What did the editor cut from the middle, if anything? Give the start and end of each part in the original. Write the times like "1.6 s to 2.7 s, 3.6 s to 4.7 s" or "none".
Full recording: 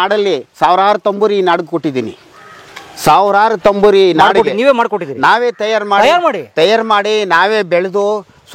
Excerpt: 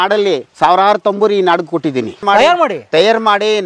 2.2 s to 5.8 s